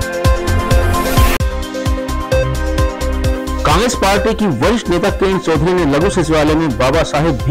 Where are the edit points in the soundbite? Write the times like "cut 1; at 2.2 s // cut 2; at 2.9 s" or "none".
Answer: cut 1; at 1.0 s